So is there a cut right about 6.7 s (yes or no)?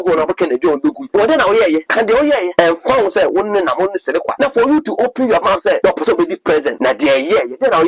yes